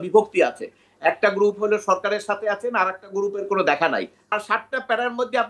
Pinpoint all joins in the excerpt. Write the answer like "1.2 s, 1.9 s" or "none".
4.4 s